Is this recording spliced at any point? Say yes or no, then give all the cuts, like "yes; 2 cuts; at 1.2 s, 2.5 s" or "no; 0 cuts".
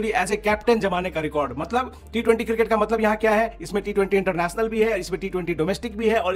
no; 0 cuts